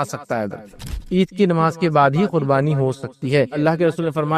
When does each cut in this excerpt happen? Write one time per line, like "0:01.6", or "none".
0:00.9
0:03.5